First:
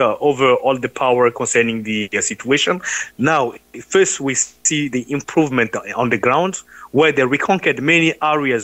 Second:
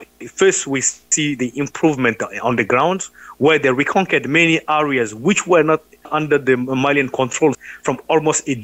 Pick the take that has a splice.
second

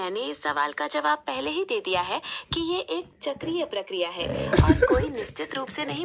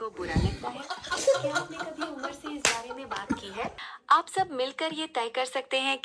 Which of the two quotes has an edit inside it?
second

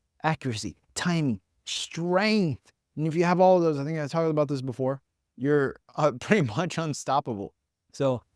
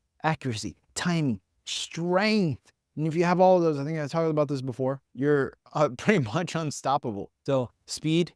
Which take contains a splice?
second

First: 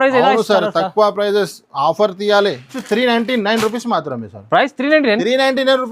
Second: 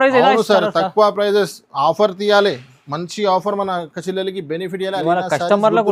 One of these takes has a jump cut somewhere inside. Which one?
first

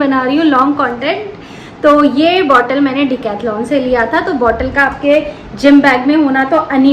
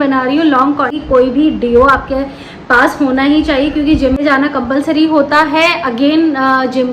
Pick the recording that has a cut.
second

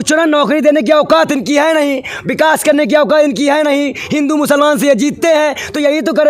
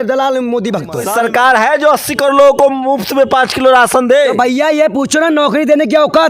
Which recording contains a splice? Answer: second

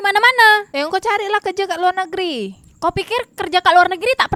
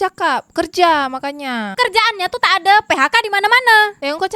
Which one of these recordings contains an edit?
second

